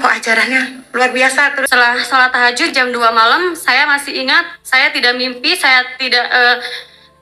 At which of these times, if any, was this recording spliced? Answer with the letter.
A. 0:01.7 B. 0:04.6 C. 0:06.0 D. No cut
A